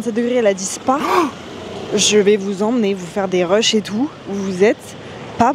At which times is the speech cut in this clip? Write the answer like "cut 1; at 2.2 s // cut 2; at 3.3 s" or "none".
none